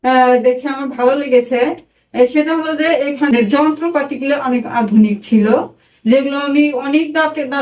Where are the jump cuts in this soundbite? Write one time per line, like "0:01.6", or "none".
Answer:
0:03.3